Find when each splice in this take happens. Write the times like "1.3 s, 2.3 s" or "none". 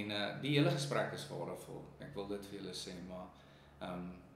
none